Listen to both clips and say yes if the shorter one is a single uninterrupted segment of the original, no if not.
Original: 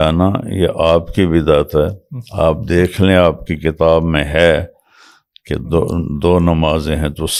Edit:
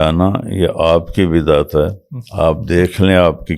yes